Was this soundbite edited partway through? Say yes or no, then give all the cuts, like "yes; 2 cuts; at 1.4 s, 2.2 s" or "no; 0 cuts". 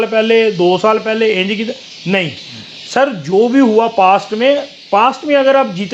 no; 0 cuts